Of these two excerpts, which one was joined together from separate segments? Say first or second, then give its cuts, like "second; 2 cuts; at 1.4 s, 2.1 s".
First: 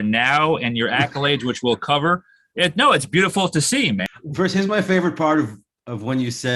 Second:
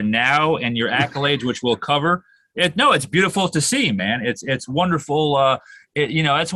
first; 1 cut; at 4.0 s